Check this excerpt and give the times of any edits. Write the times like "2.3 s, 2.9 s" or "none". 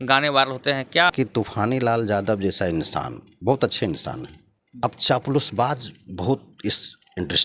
1.1 s, 4.8 s